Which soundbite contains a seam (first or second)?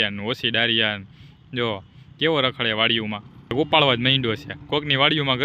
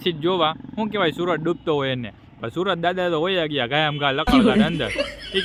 first